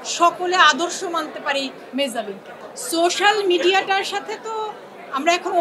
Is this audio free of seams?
no; 1 cut; at 2.6 s

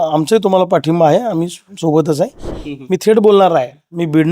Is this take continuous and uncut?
no; 1 cut; at 2.5 s

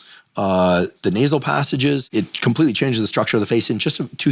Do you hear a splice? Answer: yes; 1 cut; at 2.1 s

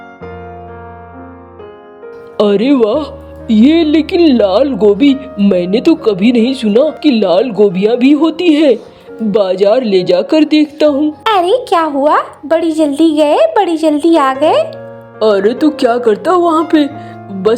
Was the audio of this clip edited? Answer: yes; 1 cut; at 11.2 s

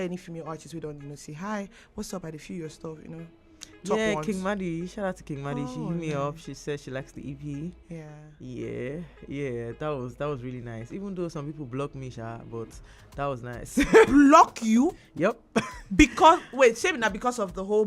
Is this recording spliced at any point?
no; 0 cuts

